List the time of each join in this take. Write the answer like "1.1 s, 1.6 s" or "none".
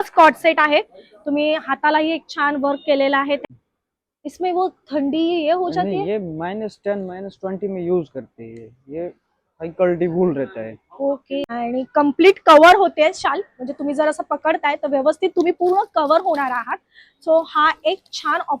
3.4 s, 11.4 s